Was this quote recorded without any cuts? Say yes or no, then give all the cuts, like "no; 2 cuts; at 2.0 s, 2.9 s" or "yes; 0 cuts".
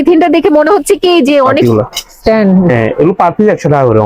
no; 1 cut; at 1.6 s